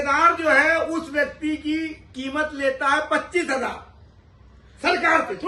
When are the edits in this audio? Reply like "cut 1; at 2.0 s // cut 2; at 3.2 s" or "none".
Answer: none